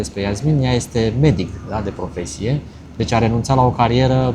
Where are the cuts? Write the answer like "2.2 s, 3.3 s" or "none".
none